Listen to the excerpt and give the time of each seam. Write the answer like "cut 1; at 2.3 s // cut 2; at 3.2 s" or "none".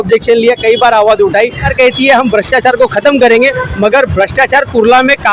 cut 1; at 1.7 s